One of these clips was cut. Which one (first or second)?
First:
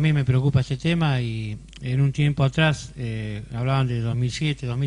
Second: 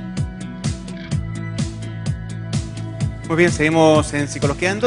first